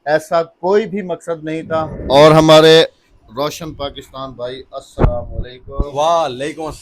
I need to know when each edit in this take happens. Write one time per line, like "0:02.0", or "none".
0:01.9